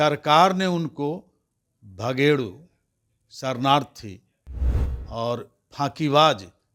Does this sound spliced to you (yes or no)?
no